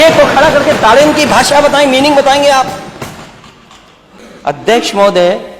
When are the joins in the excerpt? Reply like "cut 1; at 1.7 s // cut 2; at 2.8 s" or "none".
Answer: cut 1; at 4.2 s